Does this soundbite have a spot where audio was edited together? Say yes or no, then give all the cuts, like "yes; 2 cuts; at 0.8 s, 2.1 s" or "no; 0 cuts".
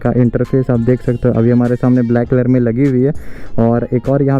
no; 0 cuts